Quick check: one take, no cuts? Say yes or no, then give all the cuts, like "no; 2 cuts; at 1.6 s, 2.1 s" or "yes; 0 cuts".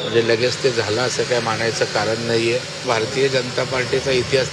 no; 1 cut; at 2.8 s